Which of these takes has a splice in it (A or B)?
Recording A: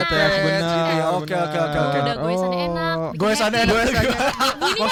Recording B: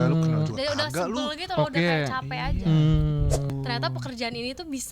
B